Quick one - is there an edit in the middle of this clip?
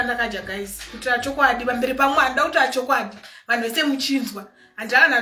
no; 0 cuts

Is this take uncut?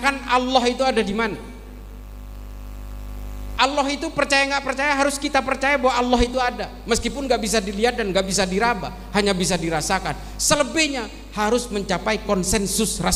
yes; 0 cuts

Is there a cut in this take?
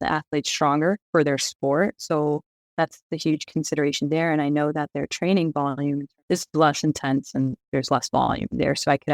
yes; 1 cut; at 1.0 s

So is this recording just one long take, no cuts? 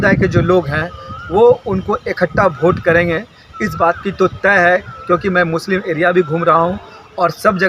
yes; 0 cuts

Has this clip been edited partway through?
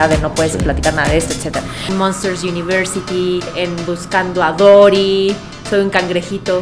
yes; 2 cuts; at 1.9 s, 3.5 s

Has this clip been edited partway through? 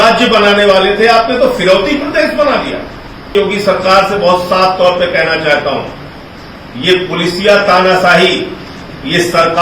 yes; 1 cut; at 3.3 s

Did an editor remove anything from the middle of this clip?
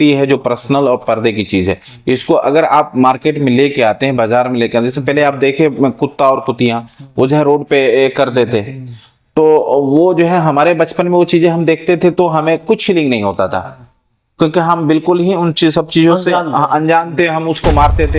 no; 0 cuts

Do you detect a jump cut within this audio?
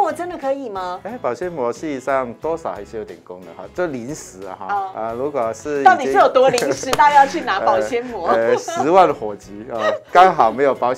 yes; 2 cuts; at 1.0 s, 4.9 s

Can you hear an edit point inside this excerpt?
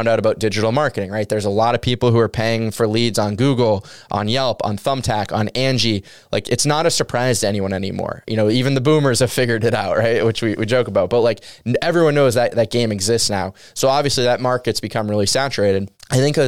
no; 0 cuts

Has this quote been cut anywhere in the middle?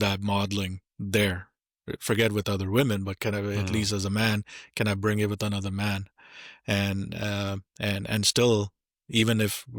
no; 0 cuts

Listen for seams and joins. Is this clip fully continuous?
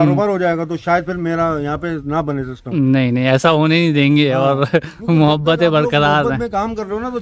yes; 0 cuts

